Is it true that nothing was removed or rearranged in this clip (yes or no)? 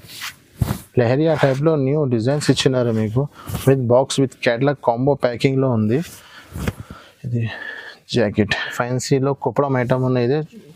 no